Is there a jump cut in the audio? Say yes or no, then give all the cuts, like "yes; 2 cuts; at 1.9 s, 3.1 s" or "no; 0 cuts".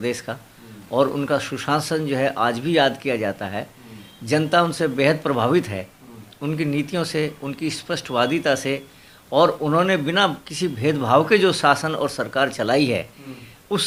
no; 0 cuts